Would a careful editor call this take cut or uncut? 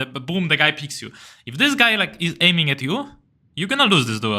uncut